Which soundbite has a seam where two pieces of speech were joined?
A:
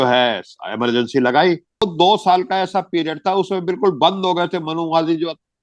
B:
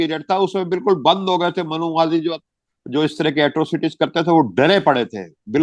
A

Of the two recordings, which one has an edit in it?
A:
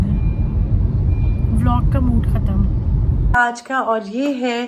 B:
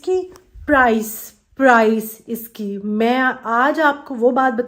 A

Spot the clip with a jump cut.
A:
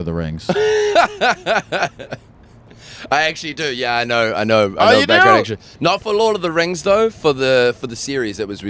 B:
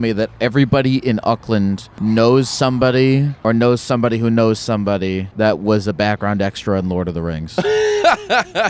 B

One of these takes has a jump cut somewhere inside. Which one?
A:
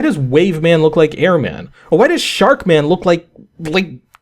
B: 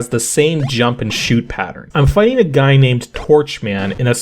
B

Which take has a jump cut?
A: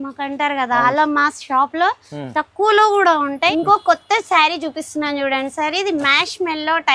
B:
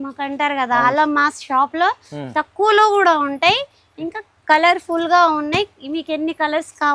A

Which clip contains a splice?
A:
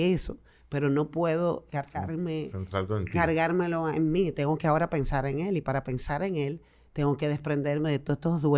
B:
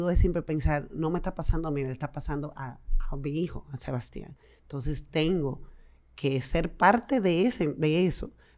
A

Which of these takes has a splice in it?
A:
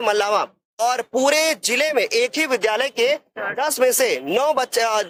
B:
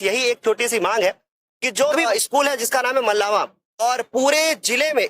B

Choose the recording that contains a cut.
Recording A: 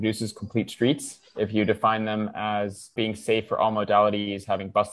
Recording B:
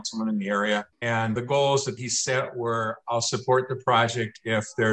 B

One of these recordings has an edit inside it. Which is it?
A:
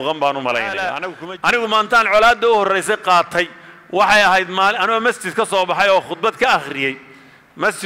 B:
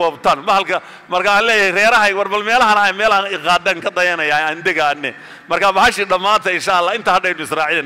A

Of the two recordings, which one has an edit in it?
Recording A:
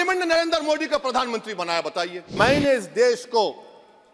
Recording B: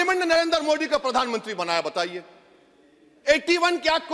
A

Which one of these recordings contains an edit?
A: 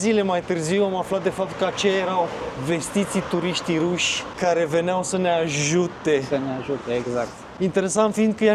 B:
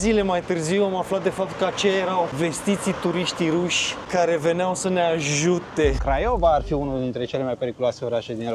B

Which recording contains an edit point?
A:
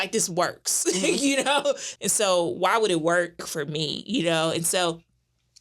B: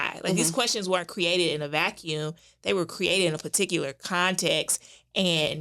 A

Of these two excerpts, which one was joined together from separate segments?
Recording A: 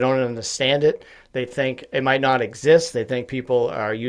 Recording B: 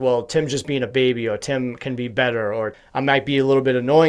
B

